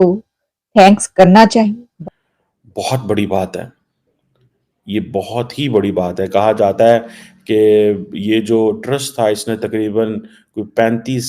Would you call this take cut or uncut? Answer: cut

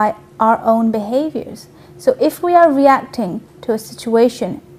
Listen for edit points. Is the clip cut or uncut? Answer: cut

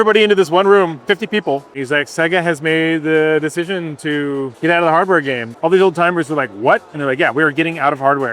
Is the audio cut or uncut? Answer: cut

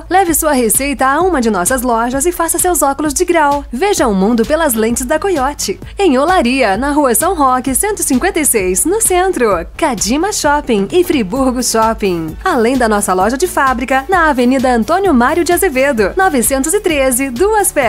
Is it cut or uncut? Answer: uncut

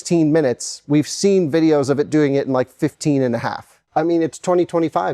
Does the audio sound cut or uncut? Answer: cut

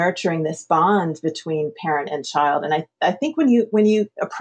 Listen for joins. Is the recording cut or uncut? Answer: uncut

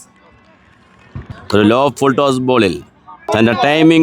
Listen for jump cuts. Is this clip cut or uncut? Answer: cut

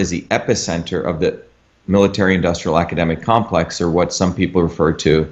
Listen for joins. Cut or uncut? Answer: uncut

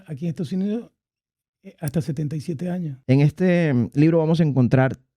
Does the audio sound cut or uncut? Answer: cut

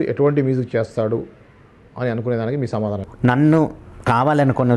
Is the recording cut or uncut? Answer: cut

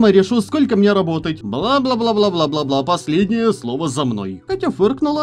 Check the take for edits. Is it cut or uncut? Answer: cut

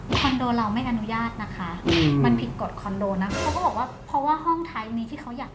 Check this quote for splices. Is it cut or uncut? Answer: cut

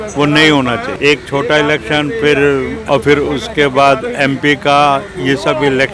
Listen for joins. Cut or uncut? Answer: cut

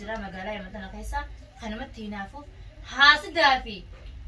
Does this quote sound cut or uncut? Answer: uncut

